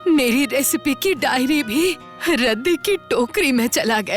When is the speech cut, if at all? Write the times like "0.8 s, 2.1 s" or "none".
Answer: 2.1 s